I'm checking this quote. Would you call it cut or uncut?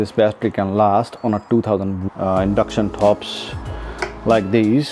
uncut